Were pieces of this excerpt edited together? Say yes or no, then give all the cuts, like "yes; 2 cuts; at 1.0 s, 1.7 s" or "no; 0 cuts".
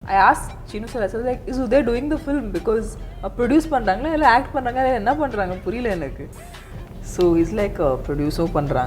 yes; 1 cut; at 1.4 s